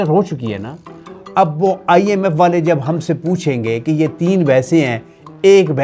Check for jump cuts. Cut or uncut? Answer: uncut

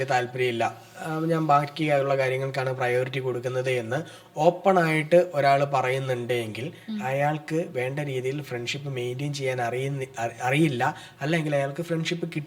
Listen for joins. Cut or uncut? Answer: uncut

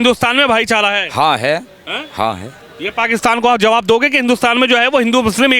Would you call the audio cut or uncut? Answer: uncut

